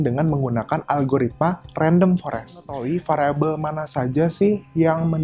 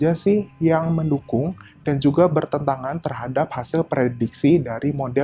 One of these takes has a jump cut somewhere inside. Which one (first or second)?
first